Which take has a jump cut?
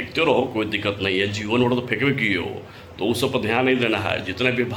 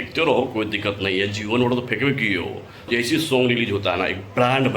second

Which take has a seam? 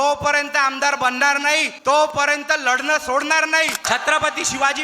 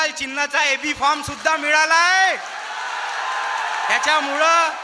first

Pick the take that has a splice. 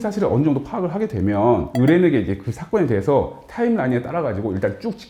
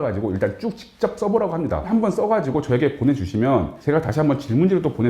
second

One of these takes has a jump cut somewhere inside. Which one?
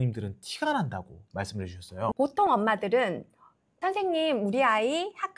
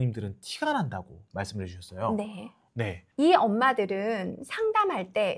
first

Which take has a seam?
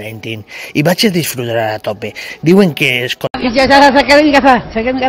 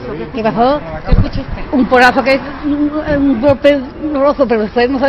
first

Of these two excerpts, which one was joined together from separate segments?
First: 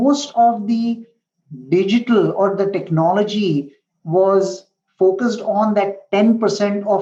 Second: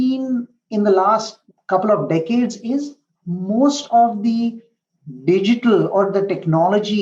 second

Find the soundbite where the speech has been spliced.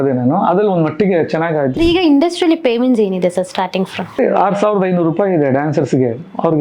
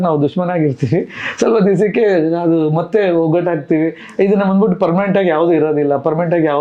first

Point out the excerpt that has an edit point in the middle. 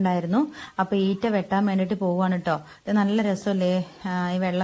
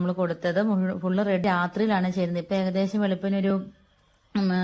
second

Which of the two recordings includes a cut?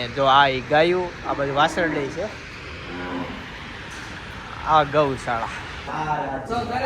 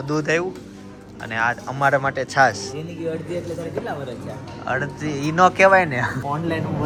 first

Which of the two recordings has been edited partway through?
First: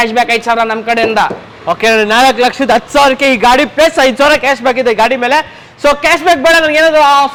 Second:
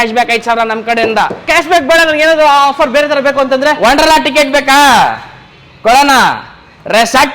second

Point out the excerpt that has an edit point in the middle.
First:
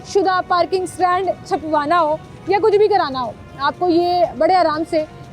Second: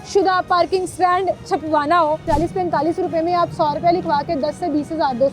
second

